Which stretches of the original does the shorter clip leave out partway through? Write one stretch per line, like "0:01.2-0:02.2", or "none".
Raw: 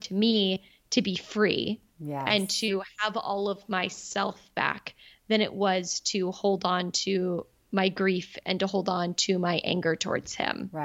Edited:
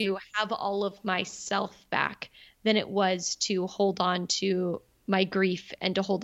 none